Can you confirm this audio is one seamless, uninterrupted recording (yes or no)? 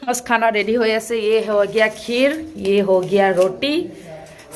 yes